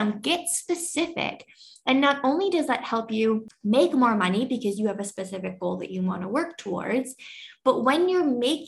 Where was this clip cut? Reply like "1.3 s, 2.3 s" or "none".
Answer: 3.5 s